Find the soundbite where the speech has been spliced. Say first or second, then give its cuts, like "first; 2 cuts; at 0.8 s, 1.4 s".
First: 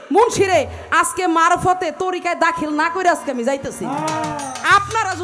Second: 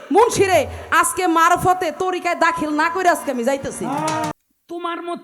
second; 1 cut; at 4.3 s